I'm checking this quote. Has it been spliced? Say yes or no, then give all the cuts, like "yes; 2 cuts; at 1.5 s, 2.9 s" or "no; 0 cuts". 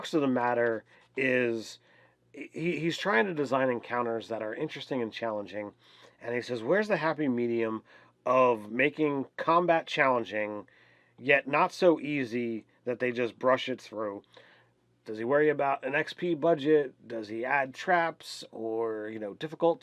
no; 0 cuts